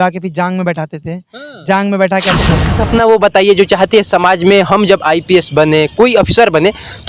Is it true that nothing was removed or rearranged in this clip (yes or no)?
no